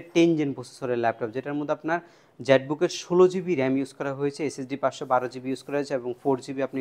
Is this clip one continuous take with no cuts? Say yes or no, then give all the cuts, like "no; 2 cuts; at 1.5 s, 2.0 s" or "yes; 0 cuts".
yes; 0 cuts